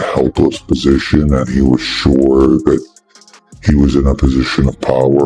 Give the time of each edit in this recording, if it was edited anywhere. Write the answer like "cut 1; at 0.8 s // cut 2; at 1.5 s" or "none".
none